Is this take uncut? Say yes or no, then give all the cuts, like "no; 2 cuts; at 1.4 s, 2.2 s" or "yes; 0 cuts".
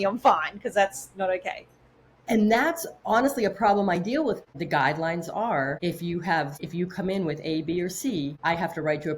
no; 4 cuts; at 4.5 s, 5.8 s, 6.6 s, 8.4 s